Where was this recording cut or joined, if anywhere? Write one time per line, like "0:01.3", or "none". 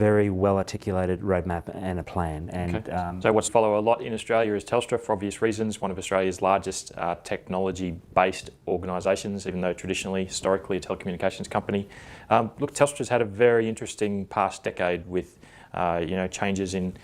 none